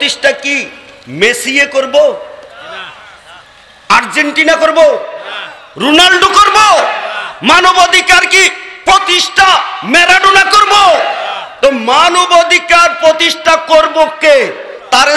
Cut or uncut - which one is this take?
uncut